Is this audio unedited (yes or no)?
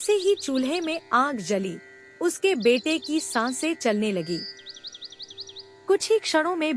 yes